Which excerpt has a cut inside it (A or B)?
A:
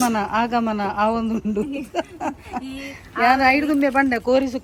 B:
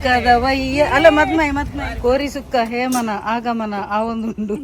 B